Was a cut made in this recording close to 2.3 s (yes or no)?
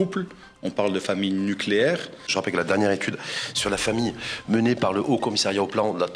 yes